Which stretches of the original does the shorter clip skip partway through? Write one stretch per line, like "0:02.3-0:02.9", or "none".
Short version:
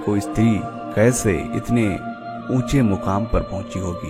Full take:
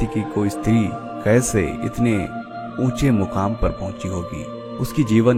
none